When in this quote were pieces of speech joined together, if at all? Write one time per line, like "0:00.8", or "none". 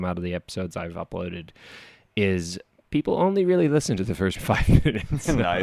0:04.4